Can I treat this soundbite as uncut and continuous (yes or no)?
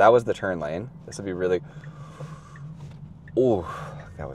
yes